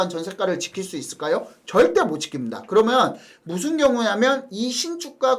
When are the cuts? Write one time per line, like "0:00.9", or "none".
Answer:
none

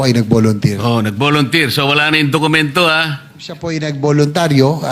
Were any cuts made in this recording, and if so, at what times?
0:03.7

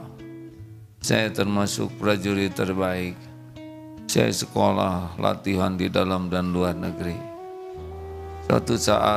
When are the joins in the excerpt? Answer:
0:07.2
0:08.5

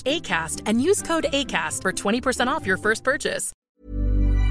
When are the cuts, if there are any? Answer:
0:03.6

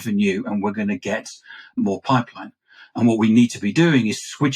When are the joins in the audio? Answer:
0:01.8

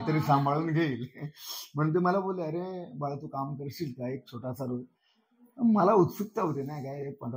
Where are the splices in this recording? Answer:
none

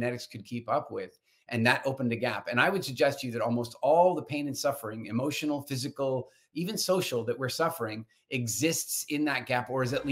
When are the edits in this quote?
none

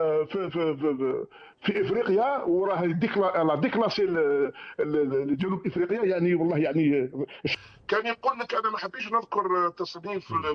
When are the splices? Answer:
0:07.5

